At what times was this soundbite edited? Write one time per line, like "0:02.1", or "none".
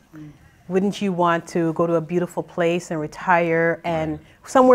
none